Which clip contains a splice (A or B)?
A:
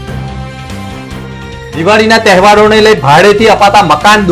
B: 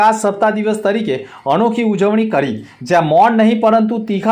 A